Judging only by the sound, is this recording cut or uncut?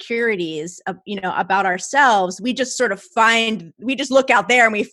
uncut